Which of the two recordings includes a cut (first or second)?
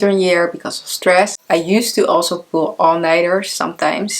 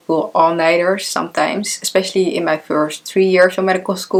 first